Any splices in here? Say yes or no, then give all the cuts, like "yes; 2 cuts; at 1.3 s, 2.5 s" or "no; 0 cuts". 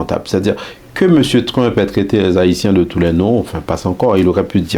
no; 0 cuts